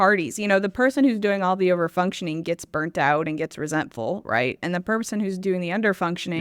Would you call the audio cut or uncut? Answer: uncut